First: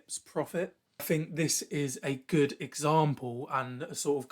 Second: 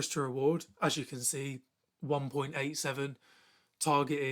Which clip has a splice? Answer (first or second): first